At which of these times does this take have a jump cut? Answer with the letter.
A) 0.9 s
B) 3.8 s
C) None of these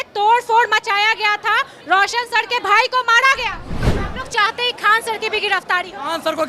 B